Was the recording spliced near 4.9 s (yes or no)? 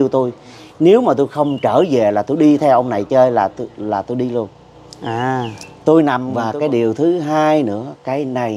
no